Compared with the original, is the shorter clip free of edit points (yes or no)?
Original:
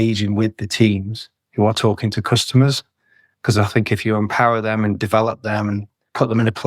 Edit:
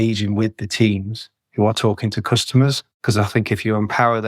no